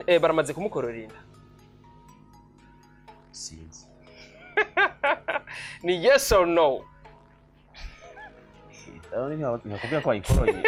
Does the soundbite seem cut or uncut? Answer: uncut